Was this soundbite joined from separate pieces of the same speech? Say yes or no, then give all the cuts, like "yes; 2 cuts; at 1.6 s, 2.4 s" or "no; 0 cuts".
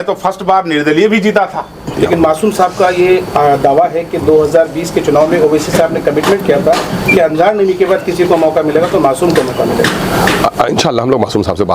yes; 1 cut; at 1.8 s